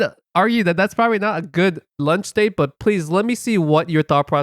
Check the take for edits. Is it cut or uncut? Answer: cut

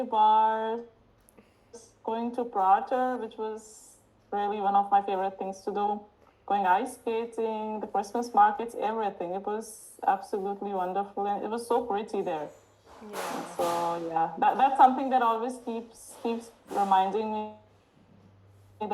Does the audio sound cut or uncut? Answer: uncut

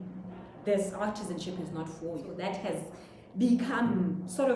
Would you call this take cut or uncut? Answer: cut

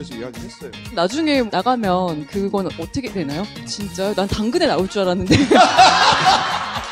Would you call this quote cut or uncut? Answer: cut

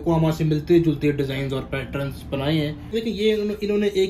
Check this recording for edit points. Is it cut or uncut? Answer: cut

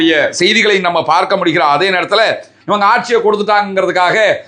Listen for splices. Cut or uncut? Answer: cut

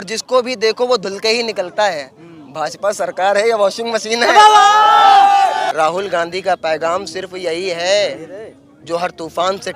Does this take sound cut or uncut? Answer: cut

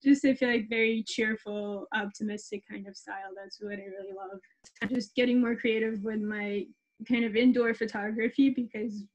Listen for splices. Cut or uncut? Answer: cut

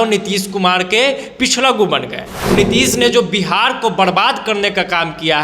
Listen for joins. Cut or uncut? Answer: cut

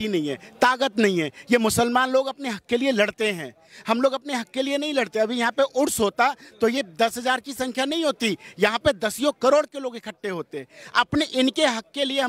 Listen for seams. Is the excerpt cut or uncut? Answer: uncut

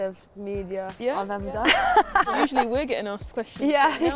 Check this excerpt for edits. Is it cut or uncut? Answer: cut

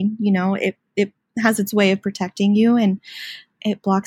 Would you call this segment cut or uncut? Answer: uncut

